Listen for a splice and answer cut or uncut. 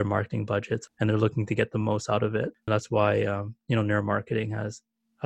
cut